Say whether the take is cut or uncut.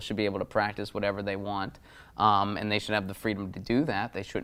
uncut